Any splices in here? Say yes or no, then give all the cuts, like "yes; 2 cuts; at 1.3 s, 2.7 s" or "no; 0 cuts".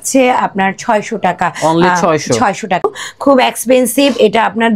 yes; 1 cut; at 2.8 s